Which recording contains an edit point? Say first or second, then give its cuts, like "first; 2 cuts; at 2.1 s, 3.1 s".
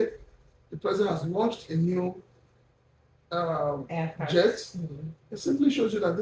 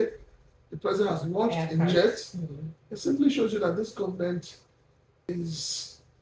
second; 2 cuts; at 1.9 s, 5.3 s